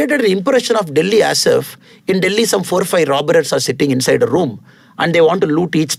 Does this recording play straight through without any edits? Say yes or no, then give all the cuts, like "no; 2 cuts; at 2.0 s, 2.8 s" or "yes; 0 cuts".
yes; 0 cuts